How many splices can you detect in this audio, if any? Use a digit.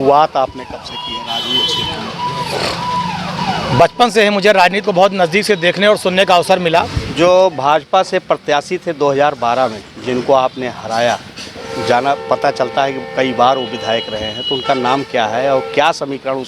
2